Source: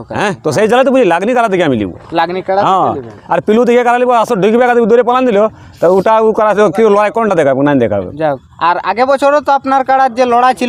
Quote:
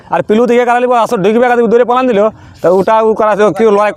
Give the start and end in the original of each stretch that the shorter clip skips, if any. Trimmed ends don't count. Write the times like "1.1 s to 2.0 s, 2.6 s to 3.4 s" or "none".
none